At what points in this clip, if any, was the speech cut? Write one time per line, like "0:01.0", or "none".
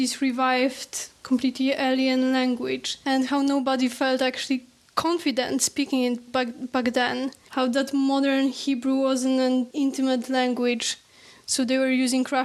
0:02.9
0:06.1
0:07.4